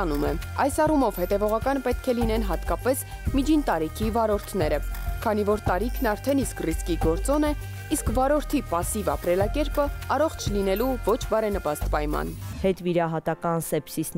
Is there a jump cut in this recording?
yes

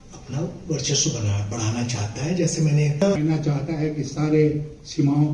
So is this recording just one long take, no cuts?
no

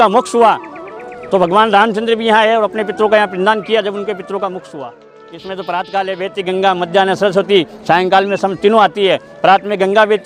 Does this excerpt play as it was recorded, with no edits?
no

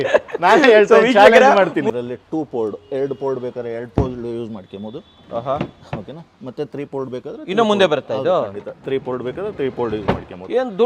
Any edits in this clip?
yes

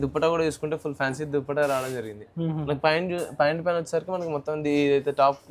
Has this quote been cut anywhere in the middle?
no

